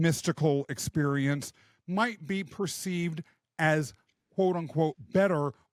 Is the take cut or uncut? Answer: uncut